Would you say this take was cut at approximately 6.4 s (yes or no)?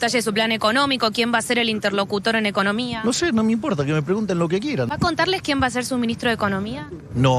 no